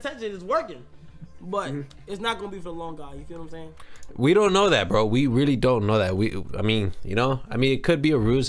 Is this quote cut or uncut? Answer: uncut